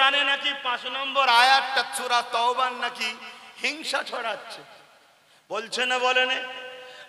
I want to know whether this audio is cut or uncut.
uncut